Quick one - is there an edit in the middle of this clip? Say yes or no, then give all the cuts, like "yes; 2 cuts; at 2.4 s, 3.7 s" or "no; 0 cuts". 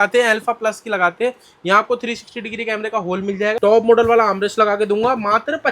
yes; 1 cut; at 3.6 s